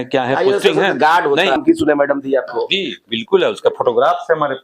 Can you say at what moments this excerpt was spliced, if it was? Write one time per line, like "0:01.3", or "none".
0:01.6